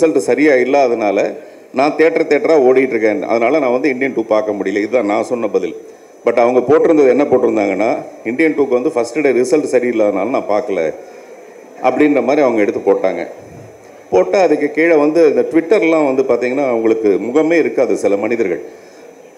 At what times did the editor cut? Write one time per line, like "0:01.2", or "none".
none